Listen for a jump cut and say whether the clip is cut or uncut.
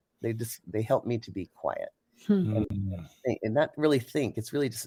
uncut